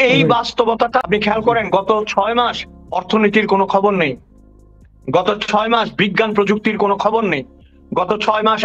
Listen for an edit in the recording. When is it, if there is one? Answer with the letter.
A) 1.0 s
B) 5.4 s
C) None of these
A